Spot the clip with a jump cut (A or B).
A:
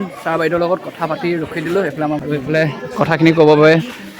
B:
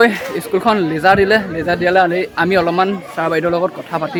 A